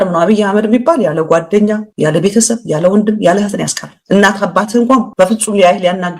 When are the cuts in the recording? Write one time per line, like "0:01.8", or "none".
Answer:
0:05.1